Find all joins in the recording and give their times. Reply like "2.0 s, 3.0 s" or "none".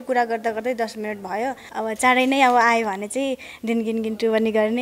1.6 s